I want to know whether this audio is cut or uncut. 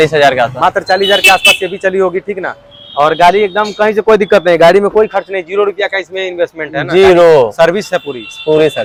uncut